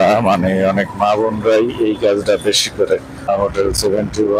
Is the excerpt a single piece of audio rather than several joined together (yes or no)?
no